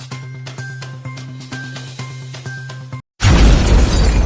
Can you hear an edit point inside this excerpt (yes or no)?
no